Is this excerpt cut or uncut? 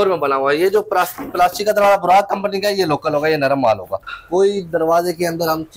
cut